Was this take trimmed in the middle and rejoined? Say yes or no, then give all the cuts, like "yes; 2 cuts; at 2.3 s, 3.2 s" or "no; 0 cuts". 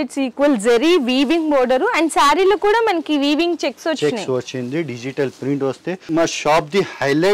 yes; 1 cut; at 6.1 s